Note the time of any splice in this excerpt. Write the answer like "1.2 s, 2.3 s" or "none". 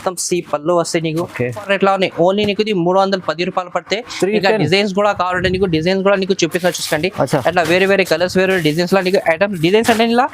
1.6 s